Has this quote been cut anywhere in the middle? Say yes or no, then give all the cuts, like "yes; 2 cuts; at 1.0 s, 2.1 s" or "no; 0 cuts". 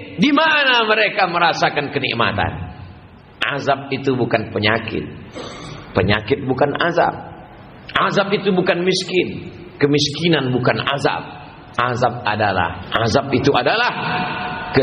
yes; 1 cut; at 12.8 s